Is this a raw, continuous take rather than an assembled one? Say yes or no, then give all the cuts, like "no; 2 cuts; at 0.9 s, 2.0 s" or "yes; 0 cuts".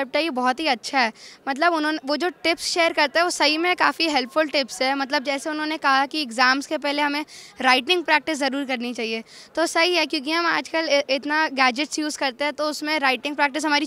yes; 0 cuts